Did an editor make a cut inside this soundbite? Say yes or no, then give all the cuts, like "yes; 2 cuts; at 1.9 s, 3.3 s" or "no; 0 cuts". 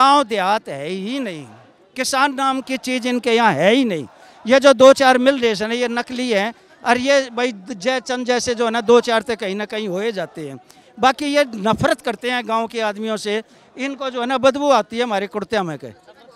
no; 0 cuts